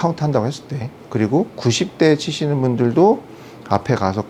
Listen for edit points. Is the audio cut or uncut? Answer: uncut